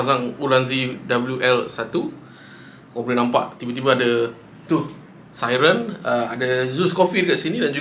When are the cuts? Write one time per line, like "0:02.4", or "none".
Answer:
none

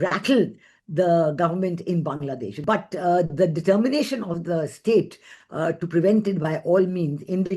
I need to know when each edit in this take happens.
0:02.5

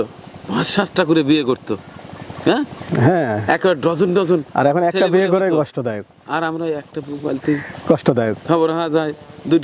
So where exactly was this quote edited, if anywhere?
none

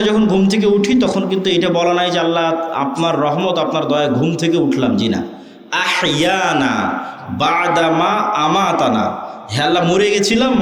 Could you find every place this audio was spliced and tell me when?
none

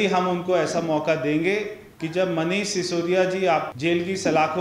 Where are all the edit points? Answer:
0:01.9

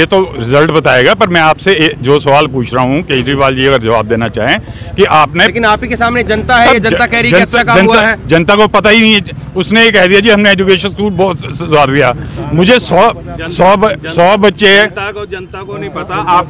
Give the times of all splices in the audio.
none

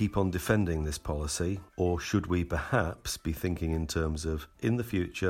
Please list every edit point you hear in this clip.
0:01.7
0:04.5

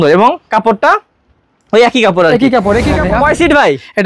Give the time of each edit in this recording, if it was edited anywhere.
0:02.9

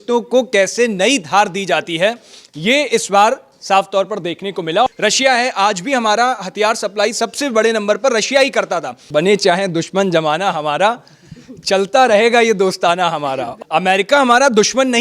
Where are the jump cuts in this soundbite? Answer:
0:04.9
0:09.0
0:13.5

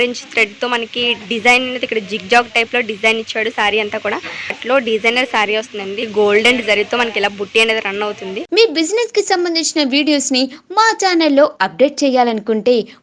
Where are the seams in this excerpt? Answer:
0:04.6
0:06.0
0:08.4

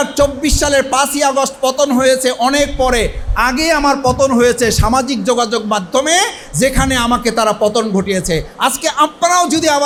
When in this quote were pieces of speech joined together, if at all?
none

